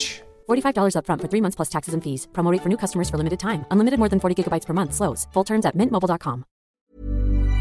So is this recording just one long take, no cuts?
no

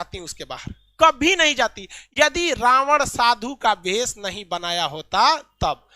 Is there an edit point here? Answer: no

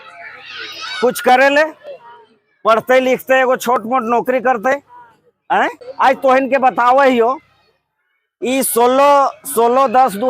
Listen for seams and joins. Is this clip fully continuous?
no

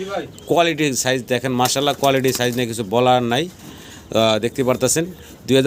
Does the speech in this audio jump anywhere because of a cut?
no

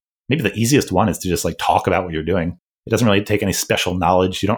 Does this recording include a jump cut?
yes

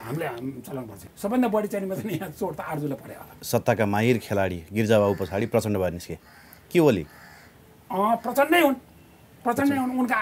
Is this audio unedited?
no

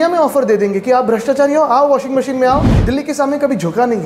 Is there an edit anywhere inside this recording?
yes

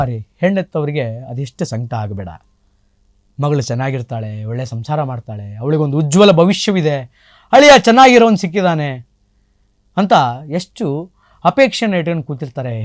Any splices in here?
no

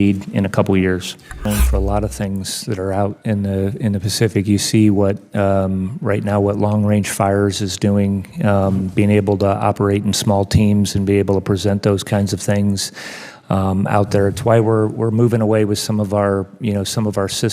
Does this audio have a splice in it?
yes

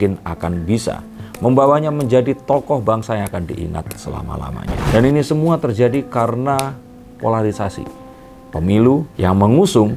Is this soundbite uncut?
no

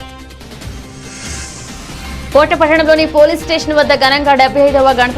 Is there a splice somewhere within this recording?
yes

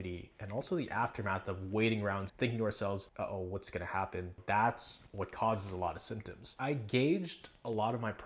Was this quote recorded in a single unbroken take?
no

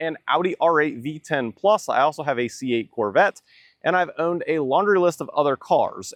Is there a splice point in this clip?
no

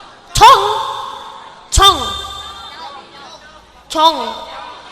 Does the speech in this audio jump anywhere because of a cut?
no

